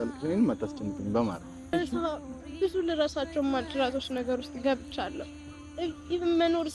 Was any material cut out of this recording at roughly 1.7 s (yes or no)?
yes